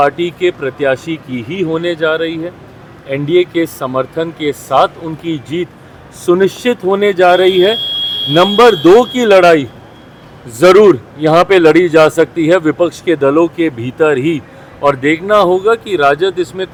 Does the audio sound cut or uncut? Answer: uncut